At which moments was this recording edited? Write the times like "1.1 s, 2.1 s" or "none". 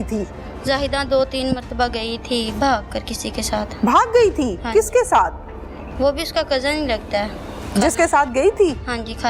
none